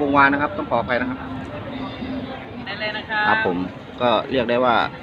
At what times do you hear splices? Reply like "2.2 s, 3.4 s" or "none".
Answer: 2.6 s